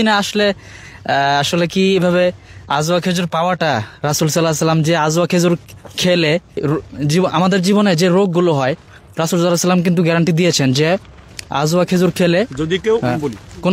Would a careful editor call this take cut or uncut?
uncut